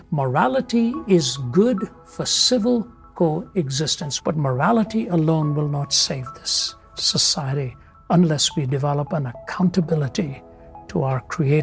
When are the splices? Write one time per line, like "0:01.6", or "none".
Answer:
0:04.0